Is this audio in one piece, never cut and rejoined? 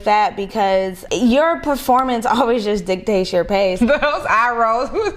no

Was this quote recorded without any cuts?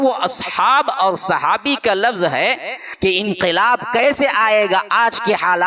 no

